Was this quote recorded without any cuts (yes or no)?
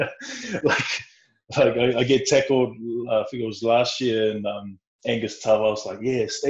yes